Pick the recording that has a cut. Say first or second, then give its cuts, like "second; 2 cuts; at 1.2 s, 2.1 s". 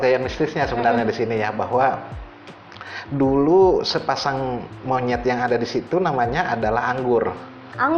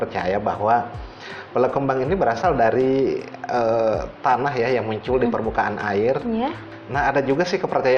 second; 1 cut; at 6.6 s